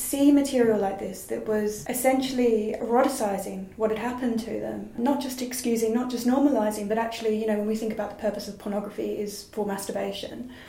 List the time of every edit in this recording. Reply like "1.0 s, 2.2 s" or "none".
2.7 s